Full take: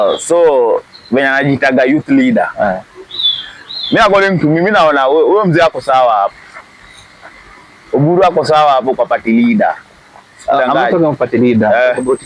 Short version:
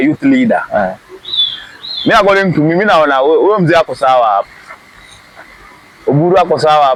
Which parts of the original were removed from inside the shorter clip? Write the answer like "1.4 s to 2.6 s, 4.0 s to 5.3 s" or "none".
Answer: none

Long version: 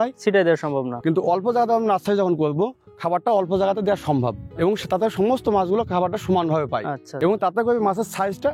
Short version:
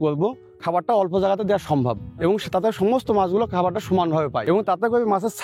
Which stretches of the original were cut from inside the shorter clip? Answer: 6.8 s to 7.1 s

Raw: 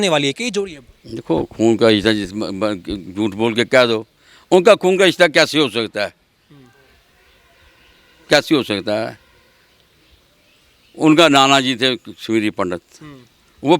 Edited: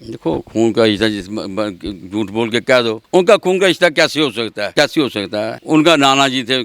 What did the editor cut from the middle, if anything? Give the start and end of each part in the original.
4.1 s to 4.4 s, 6.1 s to 8.2 s, 9.1 s to 10.9 s

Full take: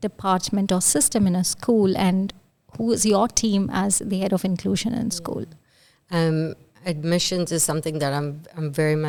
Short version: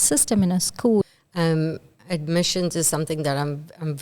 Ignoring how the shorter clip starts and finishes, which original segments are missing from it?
1.9 s to 5.8 s

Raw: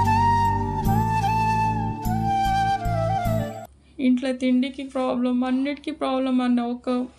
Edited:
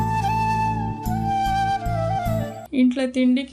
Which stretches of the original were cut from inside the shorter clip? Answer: 3.6 s to 3.8 s

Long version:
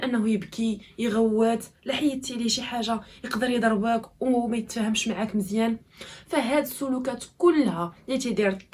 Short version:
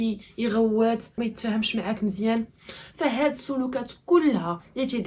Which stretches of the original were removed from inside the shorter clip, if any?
1.8 s to 4.5 s

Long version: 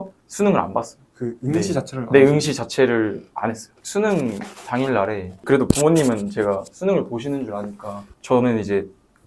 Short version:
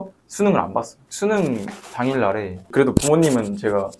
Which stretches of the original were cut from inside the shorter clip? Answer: 1.0 s to 3.7 s

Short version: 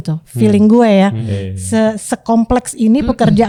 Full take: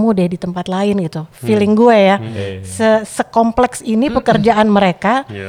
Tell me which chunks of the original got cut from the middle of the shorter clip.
none

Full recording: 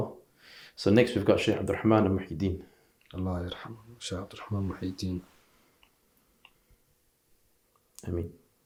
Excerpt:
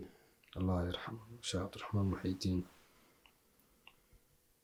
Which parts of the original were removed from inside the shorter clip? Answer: none

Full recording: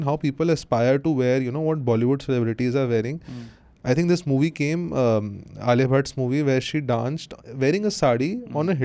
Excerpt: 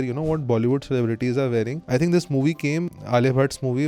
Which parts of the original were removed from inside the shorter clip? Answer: 3.2 s to 3.7 s, 4.9 s to 5.4 s

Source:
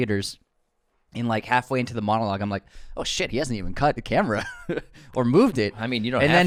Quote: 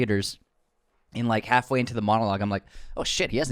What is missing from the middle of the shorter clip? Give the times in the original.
none

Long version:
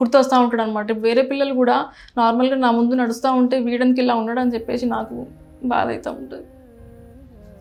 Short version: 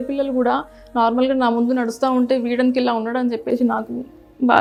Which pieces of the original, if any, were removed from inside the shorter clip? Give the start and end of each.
none

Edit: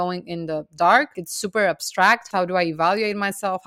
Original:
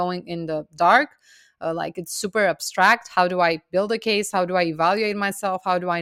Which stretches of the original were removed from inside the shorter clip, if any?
1.2 s to 2.0 s, 3.1 s to 4.3 s

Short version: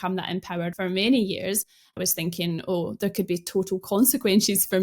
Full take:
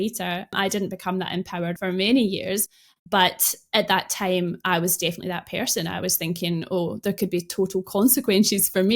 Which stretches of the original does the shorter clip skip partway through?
3.0 s to 6.0 s

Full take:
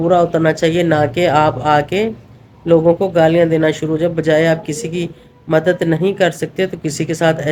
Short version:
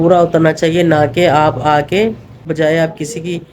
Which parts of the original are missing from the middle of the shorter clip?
2.5 s to 4.1 s

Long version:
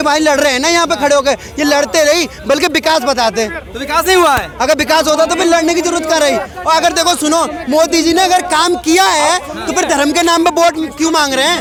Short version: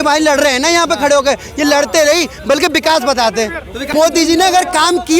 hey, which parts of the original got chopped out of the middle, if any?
3.8 s to 7.6 s

